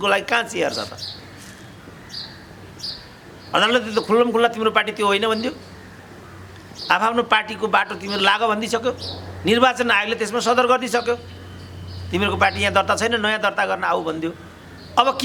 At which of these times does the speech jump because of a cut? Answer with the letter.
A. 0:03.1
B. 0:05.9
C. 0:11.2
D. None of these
D